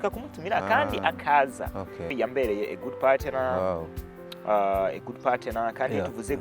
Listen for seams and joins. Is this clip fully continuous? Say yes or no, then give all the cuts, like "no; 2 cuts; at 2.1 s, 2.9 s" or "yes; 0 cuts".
no; 1 cut; at 2.1 s